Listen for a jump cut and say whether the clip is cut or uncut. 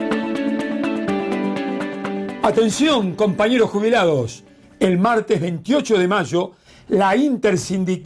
cut